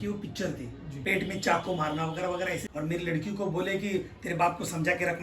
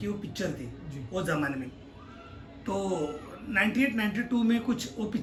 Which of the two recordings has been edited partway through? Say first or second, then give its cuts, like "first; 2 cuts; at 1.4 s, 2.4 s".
first; 2 cuts; at 1.0 s, 2.6 s